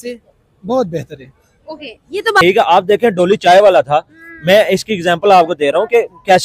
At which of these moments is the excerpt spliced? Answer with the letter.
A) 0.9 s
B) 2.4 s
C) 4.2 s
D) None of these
B